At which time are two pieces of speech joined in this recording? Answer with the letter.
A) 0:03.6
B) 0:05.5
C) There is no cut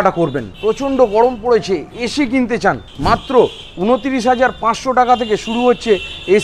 C